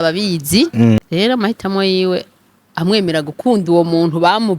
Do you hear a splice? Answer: yes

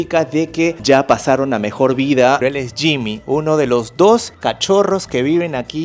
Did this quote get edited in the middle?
yes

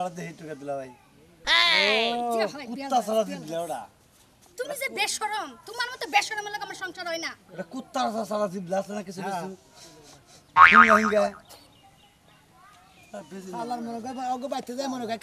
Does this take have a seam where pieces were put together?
no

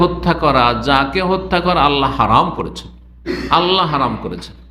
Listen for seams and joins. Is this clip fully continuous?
yes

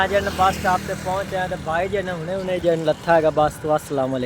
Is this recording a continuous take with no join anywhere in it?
yes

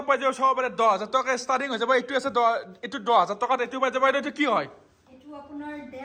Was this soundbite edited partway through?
no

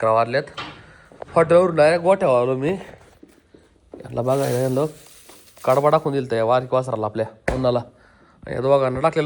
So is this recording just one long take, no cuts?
yes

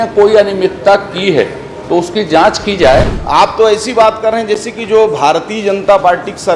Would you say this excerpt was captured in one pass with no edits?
no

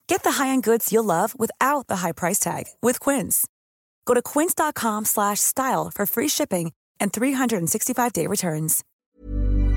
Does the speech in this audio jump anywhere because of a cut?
yes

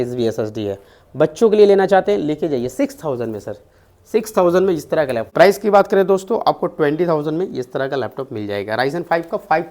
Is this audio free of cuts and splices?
no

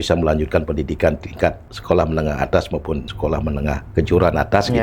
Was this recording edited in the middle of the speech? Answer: yes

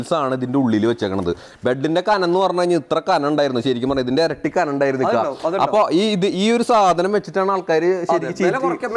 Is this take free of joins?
yes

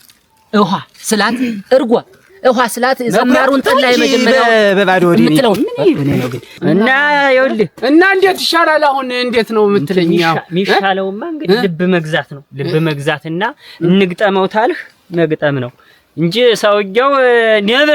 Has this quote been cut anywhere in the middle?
yes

